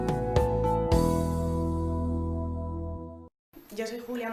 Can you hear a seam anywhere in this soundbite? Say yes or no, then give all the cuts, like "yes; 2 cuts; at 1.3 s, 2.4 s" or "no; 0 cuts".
yes; 1 cut; at 1.1 s